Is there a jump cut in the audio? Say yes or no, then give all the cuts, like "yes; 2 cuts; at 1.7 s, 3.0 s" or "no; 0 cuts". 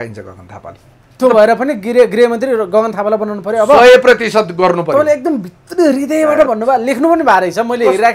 no; 0 cuts